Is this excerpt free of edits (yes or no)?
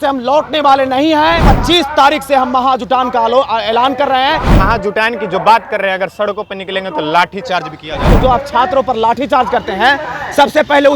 no